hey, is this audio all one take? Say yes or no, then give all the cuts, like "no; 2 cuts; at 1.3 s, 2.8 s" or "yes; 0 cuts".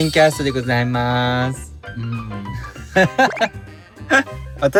yes; 0 cuts